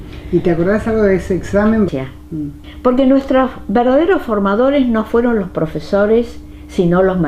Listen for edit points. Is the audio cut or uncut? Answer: uncut